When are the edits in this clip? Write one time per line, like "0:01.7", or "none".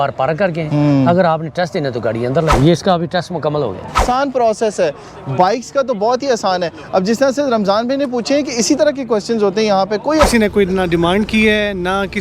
0:02.6
0:04.0
0:10.2